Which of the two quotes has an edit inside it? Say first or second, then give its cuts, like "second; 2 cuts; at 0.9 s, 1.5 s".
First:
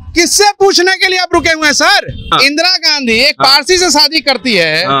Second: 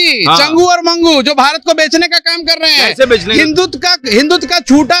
first; 1 cut; at 2.3 s